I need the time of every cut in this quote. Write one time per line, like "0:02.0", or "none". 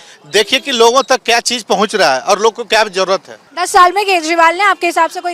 none